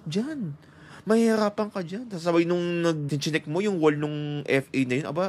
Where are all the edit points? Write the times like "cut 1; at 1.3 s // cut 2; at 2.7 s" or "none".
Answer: cut 1; at 3.1 s